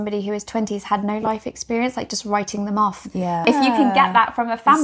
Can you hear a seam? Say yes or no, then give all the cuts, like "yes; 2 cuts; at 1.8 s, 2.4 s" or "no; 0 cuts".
yes; 1 cut; at 3.4 s